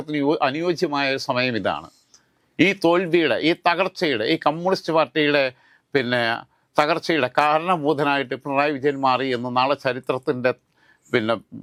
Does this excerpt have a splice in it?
no; 0 cuts

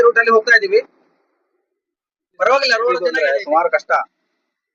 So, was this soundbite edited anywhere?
yes; 1 cut; at 3.0 s

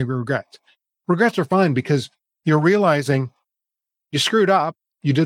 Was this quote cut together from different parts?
no; 0 cuts

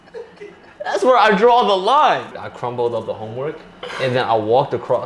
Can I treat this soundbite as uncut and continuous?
no; 1 cut; at 2.4 s

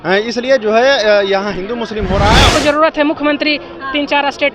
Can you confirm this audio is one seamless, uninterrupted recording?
no; 1 cut; at 2.5 s

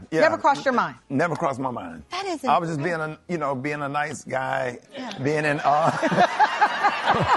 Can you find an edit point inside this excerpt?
yes; 2 cuts; at 1.0 s, 4.9 s

